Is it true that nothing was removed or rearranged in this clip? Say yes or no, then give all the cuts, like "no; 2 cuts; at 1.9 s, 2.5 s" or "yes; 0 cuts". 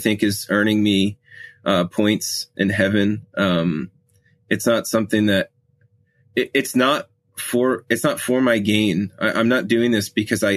yes; 0 cuts